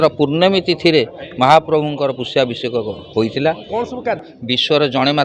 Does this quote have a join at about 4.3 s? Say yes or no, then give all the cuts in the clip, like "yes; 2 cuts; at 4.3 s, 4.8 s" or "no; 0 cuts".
yes; 1 cut; at 4.3 s